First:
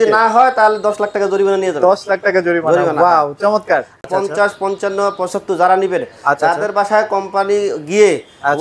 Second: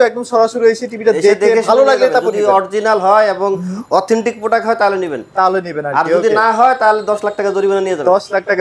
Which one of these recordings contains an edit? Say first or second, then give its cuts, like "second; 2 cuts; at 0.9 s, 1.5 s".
first; 1 cut; at 4.1 s